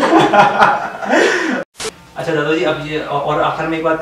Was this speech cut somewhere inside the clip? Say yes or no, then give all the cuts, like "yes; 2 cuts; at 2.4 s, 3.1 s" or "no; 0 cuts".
yes; 1 cut; at 1.7 s